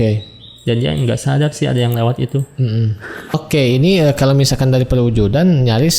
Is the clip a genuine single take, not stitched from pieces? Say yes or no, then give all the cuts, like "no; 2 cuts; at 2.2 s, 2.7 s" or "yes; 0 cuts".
no; 1 cut; at 3.3 s